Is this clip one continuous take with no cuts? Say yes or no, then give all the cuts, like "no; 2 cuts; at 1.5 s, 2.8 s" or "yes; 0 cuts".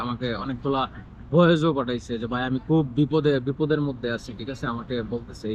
yes; 0 cuts